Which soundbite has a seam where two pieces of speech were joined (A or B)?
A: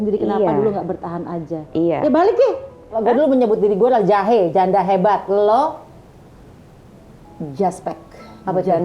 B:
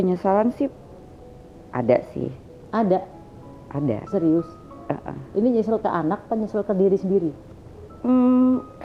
A